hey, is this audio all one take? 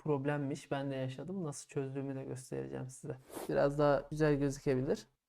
no; 1 cut; at 3.3 s

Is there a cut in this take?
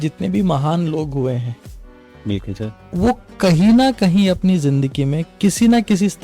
no; 0 cuts

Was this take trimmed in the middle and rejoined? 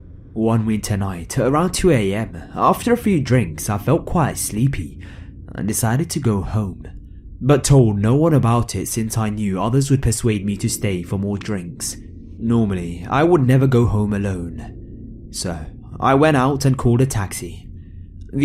no; 0 cuts

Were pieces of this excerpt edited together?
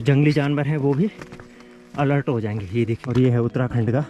yes; 1 cut; at 3.0 s

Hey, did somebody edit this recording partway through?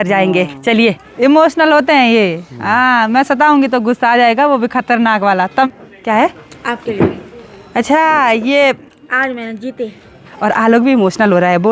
yes; 3 cuts; at 1.1 s, 5.7 s, 10.3 s

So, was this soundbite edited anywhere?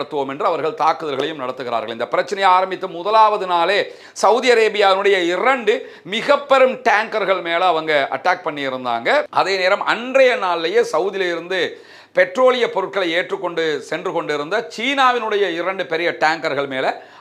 no; 0 cuts

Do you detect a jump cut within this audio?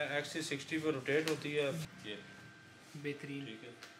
yes; 1 cut; at 1.8 s

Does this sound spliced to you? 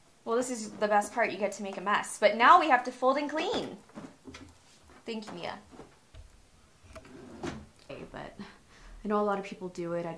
yes; 1 cut; at 7.9 s

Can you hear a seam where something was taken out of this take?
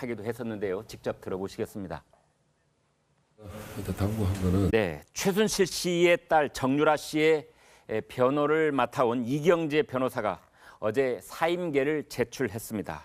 no; 0 cuts

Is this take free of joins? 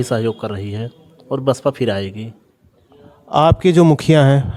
yes; 0 cuts

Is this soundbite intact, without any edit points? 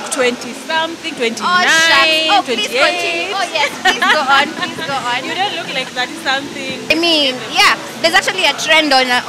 no; 1 cut; at 6.9 s

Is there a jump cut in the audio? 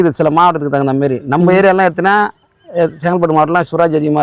no; 0 cuts

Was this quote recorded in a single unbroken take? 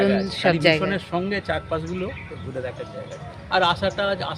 yes; 0 cuts

